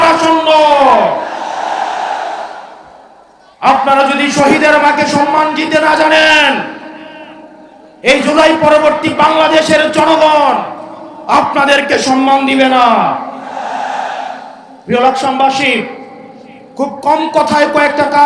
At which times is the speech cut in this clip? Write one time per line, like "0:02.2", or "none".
none